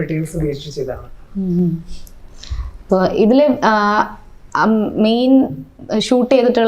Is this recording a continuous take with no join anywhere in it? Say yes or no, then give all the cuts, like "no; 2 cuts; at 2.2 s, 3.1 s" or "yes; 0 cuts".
yes; 0 cuts